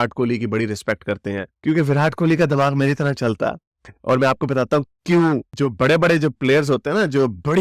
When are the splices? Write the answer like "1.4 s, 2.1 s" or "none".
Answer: 1.5 s, 5.5 s